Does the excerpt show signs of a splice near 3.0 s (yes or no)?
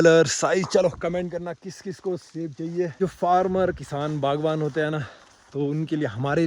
yes